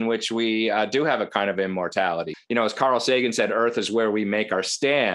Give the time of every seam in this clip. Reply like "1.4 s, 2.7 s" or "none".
2.3 s

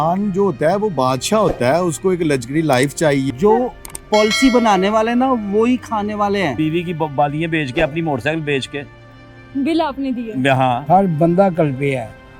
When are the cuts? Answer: 3.3 s, 6.5 s, 10.8 s

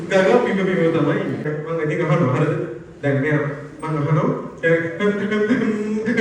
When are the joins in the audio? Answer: 1.5 s

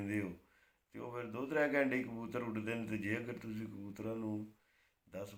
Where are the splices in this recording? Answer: none

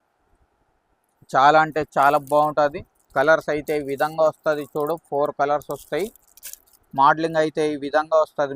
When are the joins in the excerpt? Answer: none

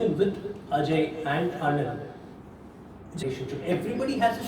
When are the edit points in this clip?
3.2 s

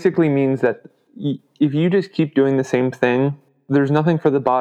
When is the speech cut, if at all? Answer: 3.5 s

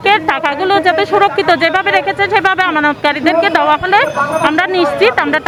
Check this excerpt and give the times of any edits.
none

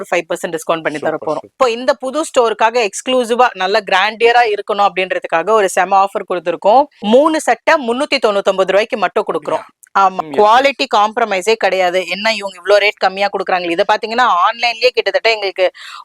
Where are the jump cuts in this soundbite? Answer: 1.5 s, 7.0 s, 10.2 s

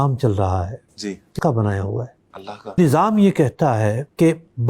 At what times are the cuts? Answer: 1.3 s, 2.8 s

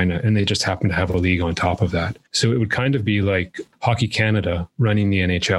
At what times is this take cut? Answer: 2.2 s, 4.7 s

